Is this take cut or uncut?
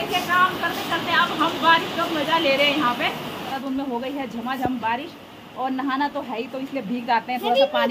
cut